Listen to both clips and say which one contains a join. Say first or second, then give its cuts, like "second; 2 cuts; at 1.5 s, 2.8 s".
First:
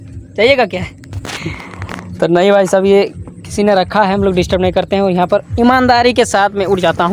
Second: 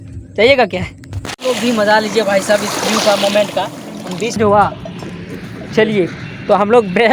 second; 2 cuts; at 1.4 s, 4.3 s